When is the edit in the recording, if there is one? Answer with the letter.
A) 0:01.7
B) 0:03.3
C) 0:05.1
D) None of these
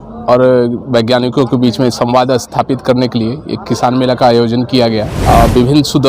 C